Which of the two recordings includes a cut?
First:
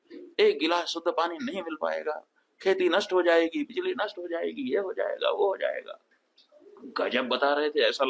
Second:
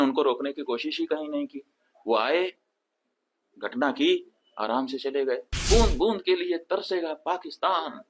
second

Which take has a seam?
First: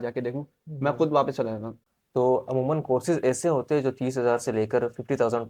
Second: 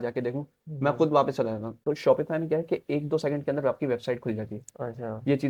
first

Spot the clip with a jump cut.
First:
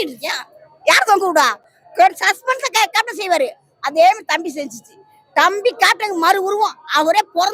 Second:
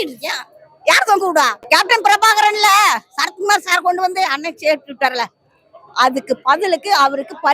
second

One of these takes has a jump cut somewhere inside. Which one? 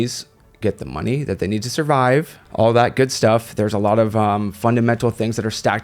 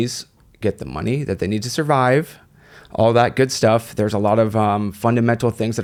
first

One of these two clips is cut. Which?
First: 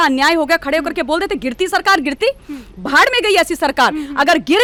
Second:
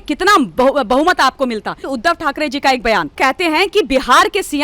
second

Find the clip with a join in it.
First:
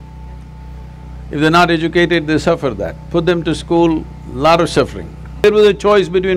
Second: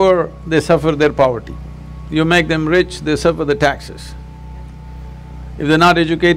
first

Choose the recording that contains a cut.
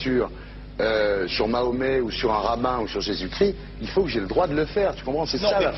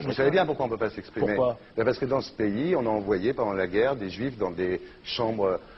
second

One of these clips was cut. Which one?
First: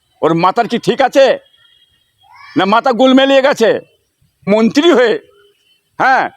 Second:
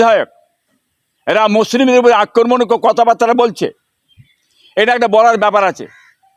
first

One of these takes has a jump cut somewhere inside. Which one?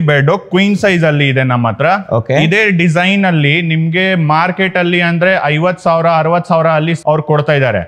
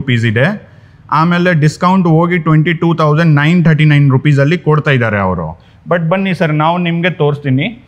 first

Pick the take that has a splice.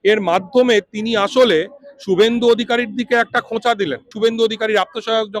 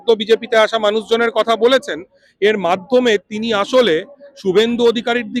first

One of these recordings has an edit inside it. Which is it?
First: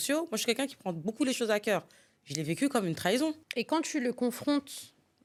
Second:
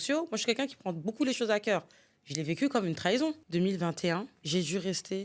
second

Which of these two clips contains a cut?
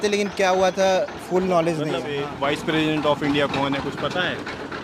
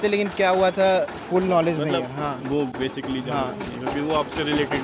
first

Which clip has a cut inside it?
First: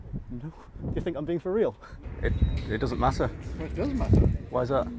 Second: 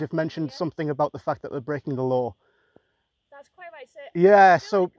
first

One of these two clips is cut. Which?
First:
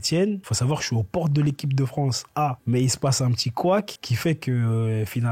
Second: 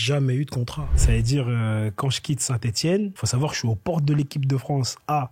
second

